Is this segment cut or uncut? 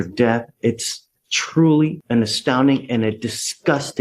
uncut